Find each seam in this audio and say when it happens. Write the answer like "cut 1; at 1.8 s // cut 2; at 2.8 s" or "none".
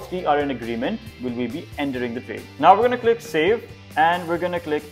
cut 1; at 2.4 s // cut 2; at 3.8 s